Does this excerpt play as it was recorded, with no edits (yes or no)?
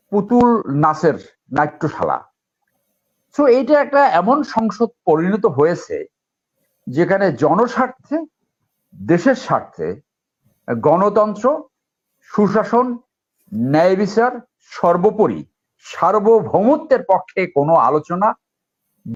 yes